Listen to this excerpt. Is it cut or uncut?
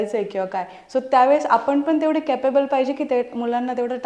uncut